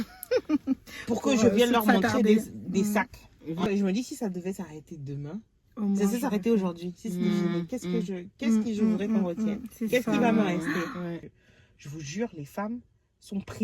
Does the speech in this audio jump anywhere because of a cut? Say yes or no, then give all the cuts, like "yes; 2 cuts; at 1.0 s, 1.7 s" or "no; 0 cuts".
yes; 2 cuts; at 3.7 s, 11.2 s